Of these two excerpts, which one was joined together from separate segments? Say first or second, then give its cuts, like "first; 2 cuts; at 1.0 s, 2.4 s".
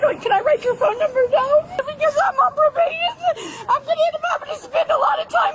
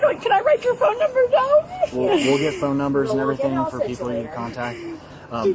first; 1 cut; at 1.8 s